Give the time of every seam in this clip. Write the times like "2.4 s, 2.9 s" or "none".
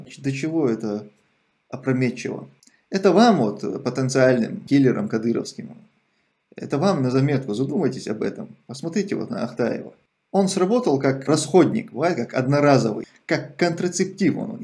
13.1 s